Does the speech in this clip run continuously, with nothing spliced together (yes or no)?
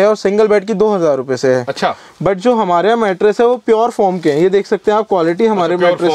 yes